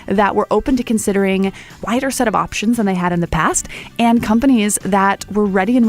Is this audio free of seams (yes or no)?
no